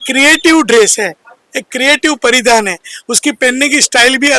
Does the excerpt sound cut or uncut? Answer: uncut